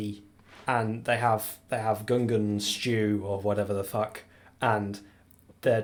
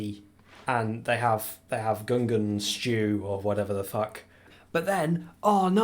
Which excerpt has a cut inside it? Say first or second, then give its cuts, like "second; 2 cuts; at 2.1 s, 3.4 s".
second; 1 cut; at 4.5 s